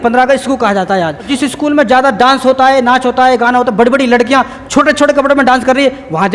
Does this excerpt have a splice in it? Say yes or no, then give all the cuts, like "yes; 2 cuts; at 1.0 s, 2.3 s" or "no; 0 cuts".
yes; 1 cut; at 1.3 s